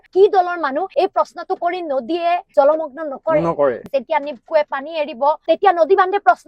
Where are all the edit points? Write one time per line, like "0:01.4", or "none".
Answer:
0:03.9
0:05.4